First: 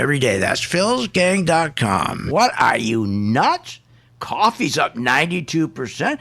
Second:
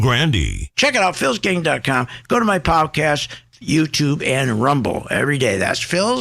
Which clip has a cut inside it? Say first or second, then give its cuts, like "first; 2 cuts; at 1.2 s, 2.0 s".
first; 1 cut; at 2.2 s